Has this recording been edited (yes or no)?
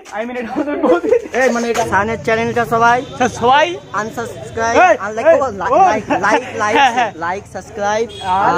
yes